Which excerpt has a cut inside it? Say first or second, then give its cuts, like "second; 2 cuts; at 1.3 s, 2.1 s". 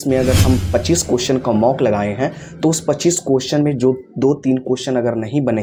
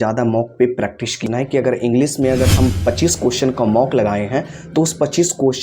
second; 1 cut; at 1.2 s